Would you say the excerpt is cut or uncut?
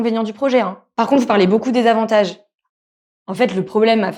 uncut